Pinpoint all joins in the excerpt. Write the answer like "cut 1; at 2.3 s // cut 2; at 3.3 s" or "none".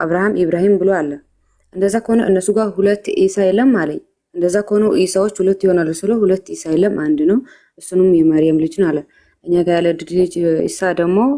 none